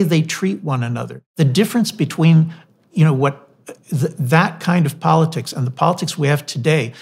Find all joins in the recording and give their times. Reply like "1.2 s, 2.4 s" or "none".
1.3 s